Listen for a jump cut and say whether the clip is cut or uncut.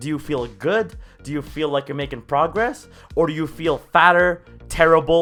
uncut